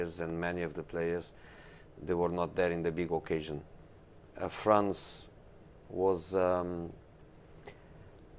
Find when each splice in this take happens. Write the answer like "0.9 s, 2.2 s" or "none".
none